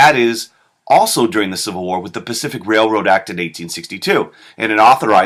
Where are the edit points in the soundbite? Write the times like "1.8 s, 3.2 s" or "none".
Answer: none